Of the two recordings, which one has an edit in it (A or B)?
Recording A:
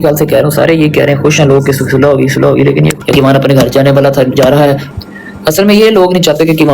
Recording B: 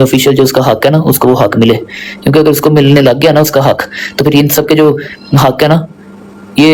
A